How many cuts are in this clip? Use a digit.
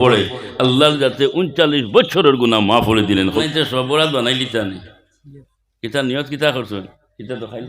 1